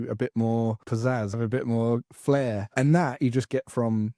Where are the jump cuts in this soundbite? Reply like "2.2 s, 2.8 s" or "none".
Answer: 1.3 s, 2.7 s